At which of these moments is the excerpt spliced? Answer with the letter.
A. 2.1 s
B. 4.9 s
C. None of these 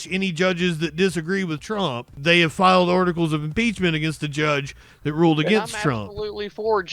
A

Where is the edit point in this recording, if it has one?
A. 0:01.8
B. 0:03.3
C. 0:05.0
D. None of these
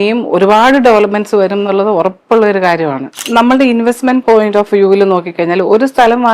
B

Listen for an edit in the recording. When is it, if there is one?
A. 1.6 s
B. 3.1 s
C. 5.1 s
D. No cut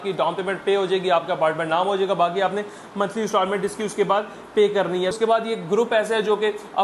C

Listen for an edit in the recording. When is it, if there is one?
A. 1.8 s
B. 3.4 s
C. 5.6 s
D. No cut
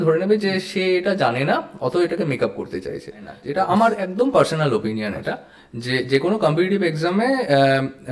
B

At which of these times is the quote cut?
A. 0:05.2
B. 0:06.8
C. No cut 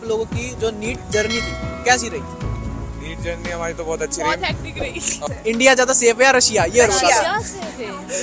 A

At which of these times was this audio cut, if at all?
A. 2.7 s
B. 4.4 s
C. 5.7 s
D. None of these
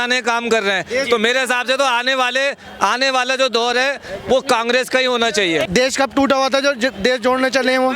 C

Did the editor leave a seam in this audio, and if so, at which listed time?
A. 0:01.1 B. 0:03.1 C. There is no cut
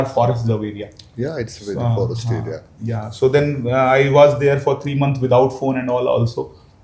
C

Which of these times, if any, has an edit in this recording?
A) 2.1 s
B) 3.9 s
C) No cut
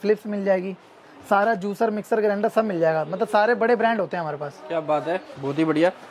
C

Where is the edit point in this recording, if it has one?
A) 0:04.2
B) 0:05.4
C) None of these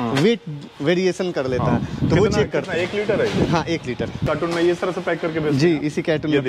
A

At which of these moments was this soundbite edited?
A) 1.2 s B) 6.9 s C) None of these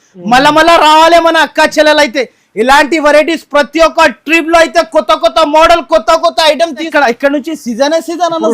B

